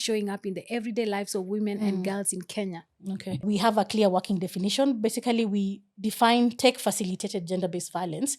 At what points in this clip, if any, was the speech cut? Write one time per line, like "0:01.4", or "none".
0:03.4